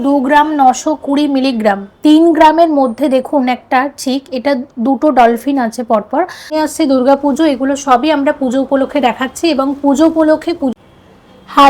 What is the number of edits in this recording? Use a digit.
2